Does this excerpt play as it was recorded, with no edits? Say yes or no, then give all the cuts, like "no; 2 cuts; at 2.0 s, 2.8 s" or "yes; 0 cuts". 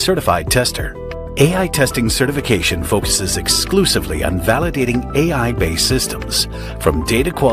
no; 1 cut; at 1.2 s